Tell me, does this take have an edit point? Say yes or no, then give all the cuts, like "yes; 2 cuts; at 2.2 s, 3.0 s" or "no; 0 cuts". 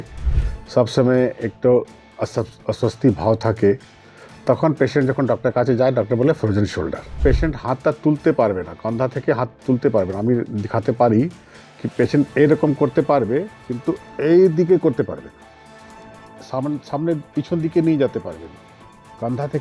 yes; 1 cut; at 7.2 s